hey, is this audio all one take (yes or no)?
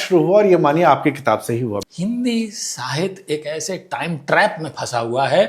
no